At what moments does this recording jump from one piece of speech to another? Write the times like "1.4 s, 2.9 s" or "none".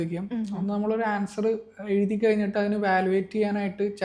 none